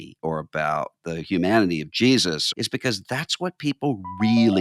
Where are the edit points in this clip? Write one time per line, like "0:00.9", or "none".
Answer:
0:02.4